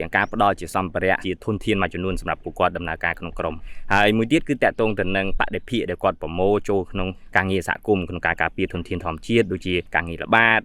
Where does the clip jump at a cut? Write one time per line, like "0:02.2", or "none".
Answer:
0:01.2
0:03.7
0:07.2